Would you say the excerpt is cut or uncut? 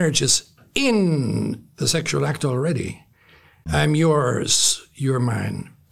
cut